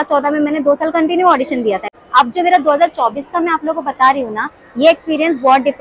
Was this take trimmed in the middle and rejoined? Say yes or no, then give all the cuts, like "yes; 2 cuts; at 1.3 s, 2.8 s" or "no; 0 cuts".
yes; 1 cut; at 1.9 s